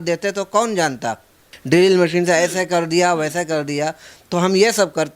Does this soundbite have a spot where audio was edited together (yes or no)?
yes